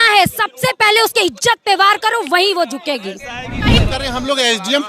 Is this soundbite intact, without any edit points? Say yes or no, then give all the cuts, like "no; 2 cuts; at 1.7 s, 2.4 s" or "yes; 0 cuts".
no; 1 cut; at 3.8 s